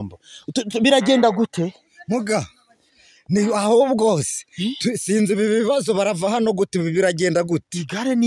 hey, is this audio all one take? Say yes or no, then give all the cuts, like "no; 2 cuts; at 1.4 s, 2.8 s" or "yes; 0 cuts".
yes; 0 cuts